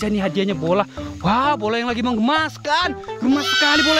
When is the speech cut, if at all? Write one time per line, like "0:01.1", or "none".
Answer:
none